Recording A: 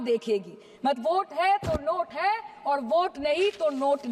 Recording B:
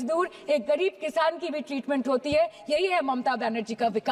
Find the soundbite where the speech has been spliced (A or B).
A